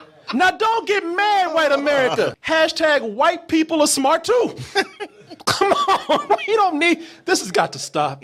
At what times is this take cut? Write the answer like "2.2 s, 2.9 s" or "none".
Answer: 2.4 s